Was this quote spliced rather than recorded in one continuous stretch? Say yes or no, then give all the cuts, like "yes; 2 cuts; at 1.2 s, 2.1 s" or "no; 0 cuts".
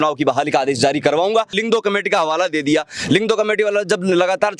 yes; 1 cut; at 1.5 s